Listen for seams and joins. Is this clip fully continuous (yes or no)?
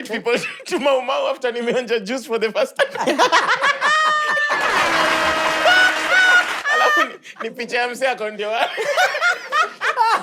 yes